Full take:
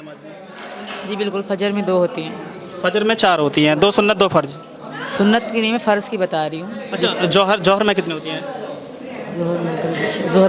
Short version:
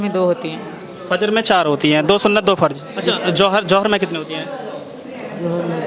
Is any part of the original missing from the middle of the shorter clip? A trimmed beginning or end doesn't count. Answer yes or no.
yes